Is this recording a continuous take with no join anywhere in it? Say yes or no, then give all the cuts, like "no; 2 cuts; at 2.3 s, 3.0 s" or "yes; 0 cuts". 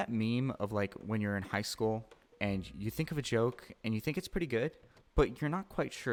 yes; 0 cuts